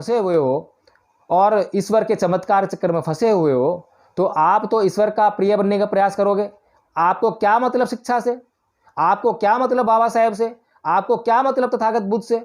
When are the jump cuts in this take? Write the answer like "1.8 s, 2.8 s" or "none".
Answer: none